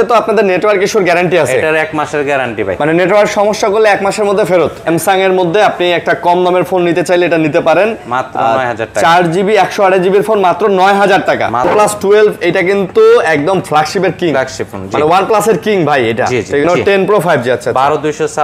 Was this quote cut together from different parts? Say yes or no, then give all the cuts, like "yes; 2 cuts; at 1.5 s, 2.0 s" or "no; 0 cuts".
yes; 3 cuts; at 4.9 s, 11.7 s, 16.6 s